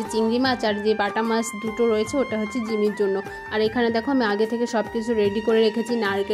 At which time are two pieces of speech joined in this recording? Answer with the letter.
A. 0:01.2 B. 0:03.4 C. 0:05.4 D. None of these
D